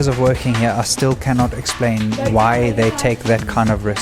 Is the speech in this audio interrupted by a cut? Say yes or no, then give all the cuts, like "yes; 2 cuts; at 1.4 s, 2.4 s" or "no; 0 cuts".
no; 0 cuts